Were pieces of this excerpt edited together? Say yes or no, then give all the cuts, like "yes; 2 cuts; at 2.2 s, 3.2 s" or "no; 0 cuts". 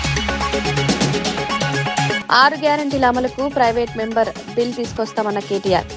yes; 1 cut; at 2.2 s